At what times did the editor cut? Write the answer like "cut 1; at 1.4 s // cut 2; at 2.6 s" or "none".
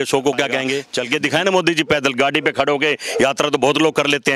cut 1; at 0.9 s

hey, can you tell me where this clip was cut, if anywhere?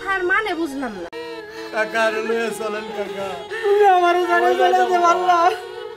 cut 1; at 1.1 s

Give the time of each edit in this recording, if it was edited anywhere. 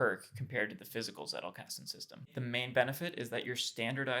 cut 1; at 2.3 s

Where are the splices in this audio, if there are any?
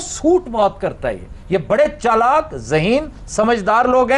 none

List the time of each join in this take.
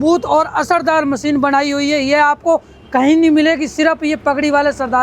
none

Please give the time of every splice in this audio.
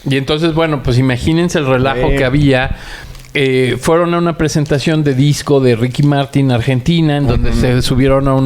none

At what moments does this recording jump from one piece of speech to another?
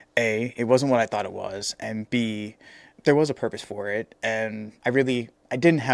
cut 1; at 4.7 s

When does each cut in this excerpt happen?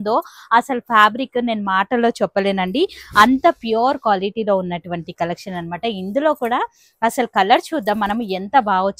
none

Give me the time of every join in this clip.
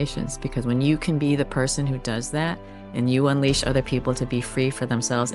none

